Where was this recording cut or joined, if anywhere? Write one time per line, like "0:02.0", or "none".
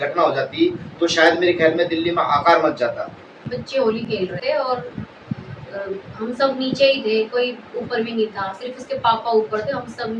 0:03.4